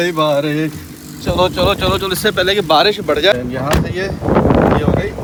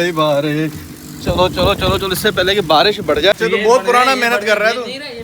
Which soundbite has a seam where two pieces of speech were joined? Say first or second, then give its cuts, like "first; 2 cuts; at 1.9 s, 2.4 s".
second; 1 cut; at 3.4 s